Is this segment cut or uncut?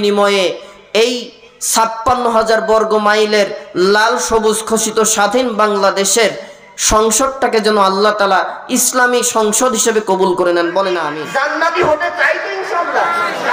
cut